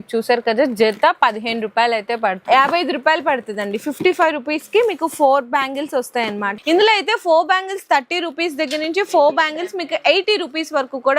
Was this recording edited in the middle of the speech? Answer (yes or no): yes